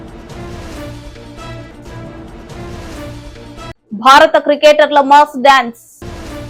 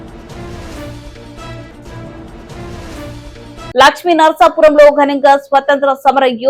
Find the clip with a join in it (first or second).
second